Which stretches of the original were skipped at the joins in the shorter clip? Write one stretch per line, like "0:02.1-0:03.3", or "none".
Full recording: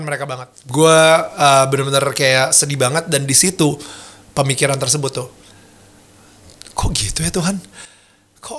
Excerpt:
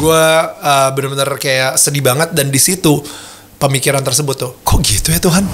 0:05.3-0:06.7